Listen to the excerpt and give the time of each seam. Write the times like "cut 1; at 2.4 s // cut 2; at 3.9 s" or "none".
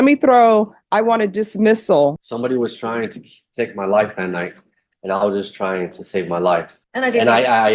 cut 1; at 2.2 s // cut 2; at 6.8 s

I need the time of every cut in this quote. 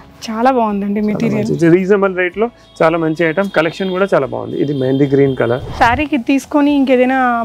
cut 1; at 5.7 s

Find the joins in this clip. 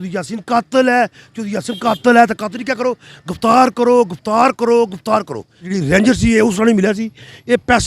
cut 1; at 5.7 s

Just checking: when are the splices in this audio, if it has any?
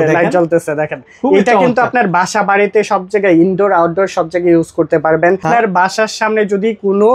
cut 1; at 5.4 s

